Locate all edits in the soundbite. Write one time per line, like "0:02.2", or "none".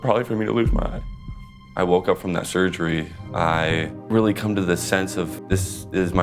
0:01.6
0:03.2
0:04.0
0:05.4